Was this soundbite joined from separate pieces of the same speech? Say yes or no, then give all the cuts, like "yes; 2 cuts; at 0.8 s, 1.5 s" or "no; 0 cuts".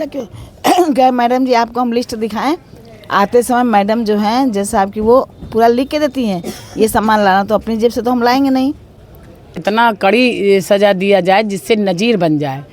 yes; 1 cut; at 9.6 s